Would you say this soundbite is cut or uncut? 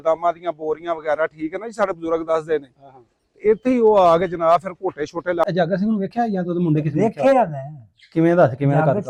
cut